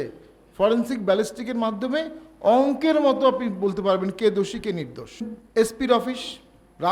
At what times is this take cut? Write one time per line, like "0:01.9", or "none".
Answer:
0:05.3